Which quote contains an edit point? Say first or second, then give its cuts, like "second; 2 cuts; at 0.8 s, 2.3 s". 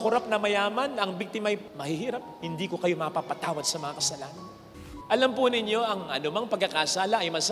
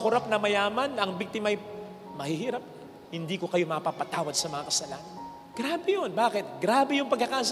first; 2 cuts; at 2.1 s, 4.8 s